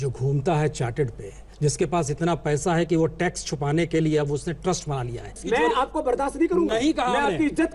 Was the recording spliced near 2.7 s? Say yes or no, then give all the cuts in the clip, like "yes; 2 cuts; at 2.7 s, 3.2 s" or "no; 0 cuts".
no; 2 cuts; at 1.4 s, 5.4 s